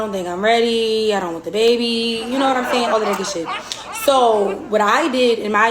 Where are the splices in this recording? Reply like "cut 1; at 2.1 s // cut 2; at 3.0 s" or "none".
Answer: cut 1; at 2.2 s